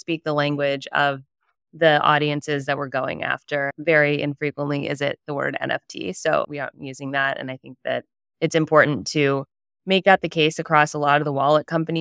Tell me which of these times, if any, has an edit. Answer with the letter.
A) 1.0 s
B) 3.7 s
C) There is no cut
B